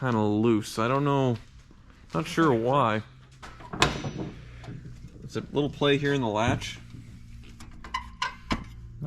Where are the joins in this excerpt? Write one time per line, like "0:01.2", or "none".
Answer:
0:03.5

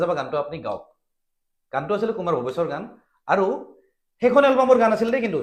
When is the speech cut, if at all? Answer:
none

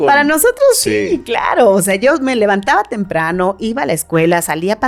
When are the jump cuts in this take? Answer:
none

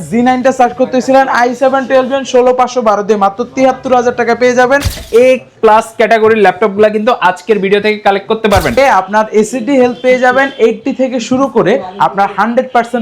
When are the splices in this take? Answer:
0:05.0
0:08.7

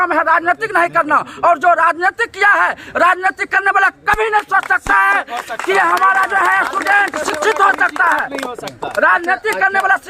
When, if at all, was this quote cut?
none

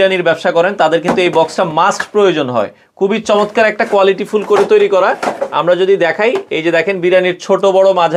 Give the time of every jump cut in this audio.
none

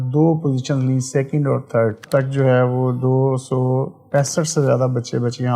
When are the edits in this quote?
0:02.0

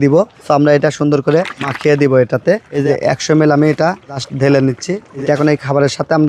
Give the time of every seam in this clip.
0:02.8
0:05.1

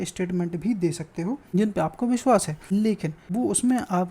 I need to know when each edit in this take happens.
0:01.5
0:02.9

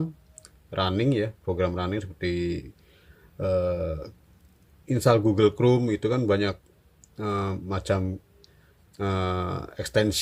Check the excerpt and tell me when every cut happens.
none

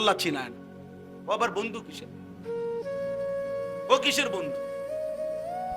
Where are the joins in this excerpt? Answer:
0:04.7

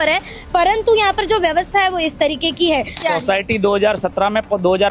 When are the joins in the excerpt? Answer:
0:03.0

